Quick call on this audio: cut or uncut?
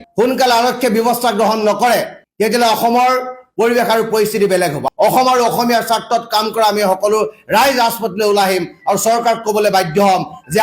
cut